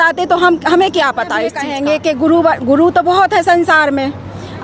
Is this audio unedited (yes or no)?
no